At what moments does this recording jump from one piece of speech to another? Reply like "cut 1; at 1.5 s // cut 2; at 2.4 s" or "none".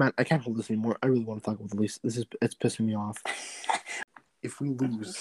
cut 1; at 3.9 s